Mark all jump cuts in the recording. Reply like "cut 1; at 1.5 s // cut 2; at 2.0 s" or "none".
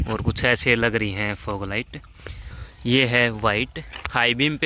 cut 1; at 2.0 s